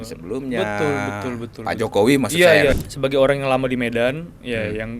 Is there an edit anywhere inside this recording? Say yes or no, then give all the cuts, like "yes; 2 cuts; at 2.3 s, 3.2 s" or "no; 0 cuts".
yes; 1 cut; at 2.7 s